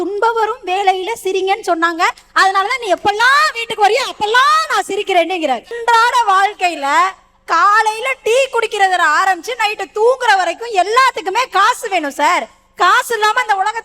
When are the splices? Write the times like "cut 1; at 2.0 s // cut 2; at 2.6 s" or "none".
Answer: cut 1; at 5.7 s

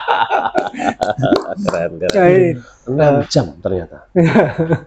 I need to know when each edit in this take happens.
cut 1; at 3.3 s

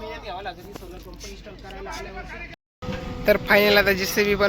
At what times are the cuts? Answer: cut 1; at 2.5 s

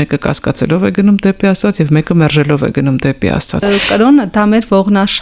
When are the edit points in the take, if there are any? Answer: cut 1; at 3.6 s

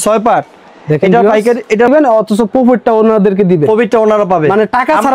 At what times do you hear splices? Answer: cut 1; at 1.9 s

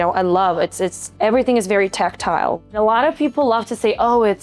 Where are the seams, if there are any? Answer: cut 1; at 1.0 s // cut 2; at 2.7 s

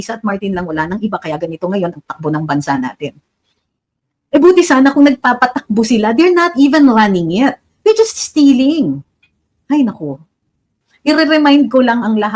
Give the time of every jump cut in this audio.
cut 1; at 10.8 s

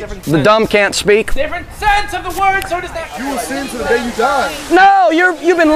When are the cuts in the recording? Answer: cut 1; at 3.1 s

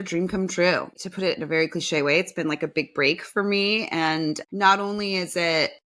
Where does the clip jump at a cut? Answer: cut 1; at 0.9 s

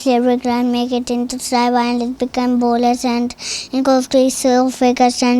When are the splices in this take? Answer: none

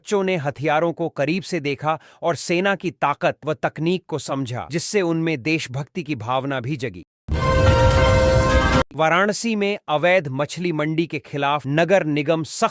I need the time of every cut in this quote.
cut 1; at 7.1 s // cut 2; at 8.9 s

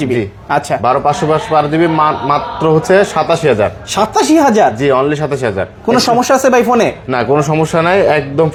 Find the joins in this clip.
none

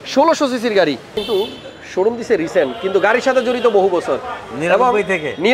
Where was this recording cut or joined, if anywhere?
cut 1; at 1.2 s

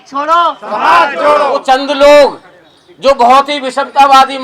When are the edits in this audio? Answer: cut 1; at 1.6 s

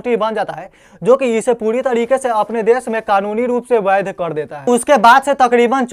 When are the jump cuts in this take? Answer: none

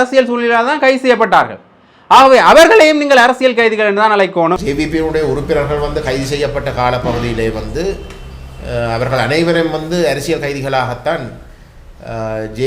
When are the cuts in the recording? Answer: cut 1; at 4.6 s

